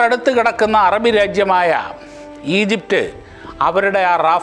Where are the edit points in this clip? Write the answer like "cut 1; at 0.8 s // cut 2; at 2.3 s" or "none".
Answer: none